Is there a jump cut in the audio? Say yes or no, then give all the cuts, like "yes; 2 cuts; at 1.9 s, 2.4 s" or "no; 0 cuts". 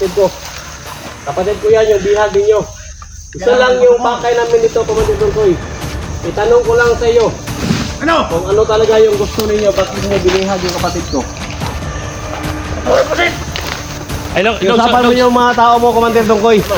no; 0 cuts